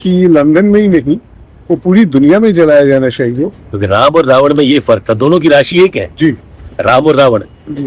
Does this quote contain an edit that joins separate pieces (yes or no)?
yes